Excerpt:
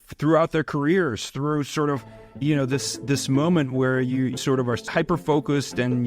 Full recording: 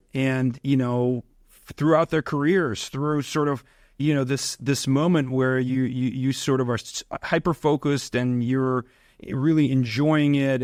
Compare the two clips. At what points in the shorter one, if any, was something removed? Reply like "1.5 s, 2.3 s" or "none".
4.4 s